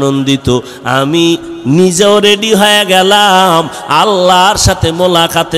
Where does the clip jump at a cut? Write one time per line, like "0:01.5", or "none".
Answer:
none